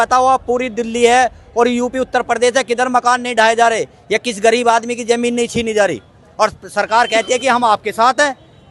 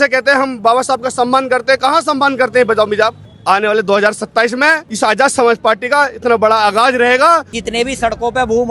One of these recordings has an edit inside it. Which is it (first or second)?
second